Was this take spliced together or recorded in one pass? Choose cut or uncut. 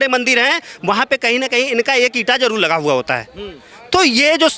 uncut